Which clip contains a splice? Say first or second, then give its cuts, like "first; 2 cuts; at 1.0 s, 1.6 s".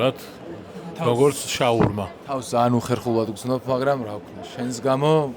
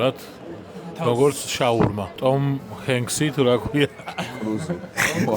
second; 1 cut; at 2.2 s